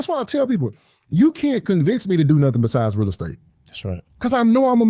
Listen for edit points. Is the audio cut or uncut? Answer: uncut